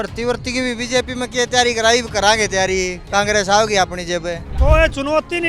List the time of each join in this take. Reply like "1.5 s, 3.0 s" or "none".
4.5 s